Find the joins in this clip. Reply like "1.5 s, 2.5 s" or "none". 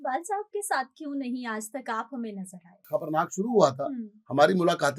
2.9 s